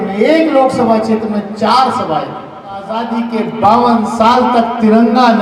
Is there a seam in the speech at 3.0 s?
yes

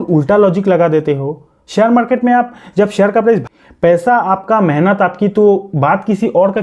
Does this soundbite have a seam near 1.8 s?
no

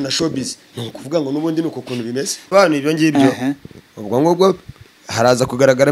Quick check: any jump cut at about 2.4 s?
yes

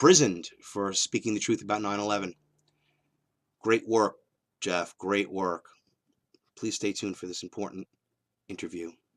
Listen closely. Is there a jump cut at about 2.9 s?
no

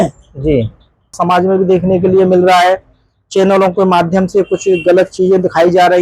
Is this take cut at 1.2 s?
yes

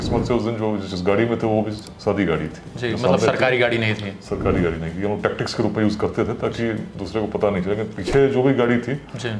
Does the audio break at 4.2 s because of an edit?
no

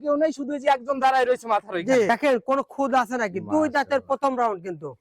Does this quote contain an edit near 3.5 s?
no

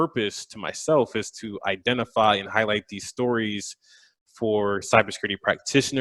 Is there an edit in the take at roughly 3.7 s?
no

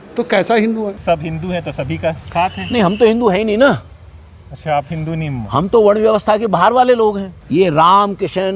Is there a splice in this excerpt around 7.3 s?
yes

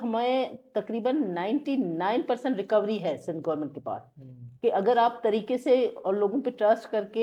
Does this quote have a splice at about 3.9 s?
no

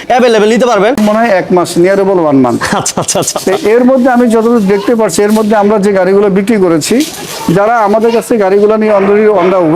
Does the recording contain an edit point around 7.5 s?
no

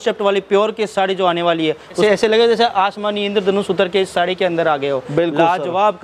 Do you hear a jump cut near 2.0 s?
yes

